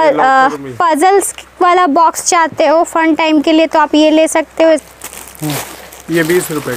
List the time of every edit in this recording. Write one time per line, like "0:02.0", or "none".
0:04.8